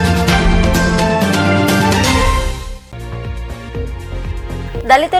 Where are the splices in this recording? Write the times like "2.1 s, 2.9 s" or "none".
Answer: none